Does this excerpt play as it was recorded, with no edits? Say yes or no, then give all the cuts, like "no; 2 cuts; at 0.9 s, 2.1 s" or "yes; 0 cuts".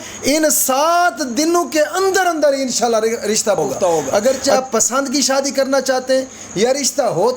no; 1 cut; at 4.1 s